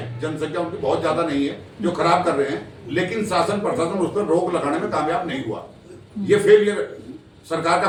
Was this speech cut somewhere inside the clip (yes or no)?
no